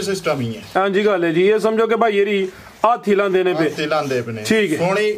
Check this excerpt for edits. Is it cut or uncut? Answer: uncut